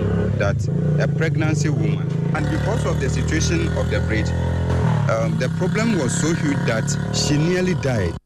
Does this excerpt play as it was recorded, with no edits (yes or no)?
no